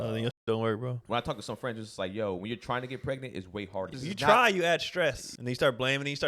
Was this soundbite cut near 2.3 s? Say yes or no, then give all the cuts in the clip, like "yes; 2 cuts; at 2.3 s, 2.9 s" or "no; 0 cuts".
no; 3 cuts; at 1.0 s, 3.9 s, 5.3 s